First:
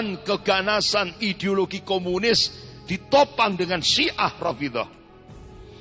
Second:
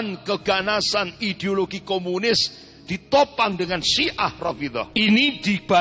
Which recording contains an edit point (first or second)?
second